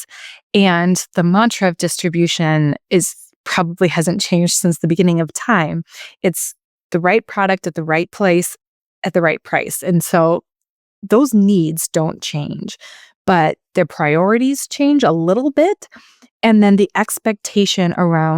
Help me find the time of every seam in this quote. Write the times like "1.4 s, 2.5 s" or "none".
4.9 s, 8.1 s